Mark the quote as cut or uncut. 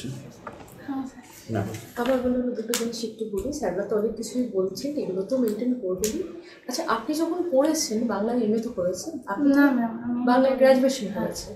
cut